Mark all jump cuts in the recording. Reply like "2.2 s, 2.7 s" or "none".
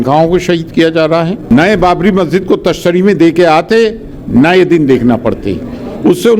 1.4 s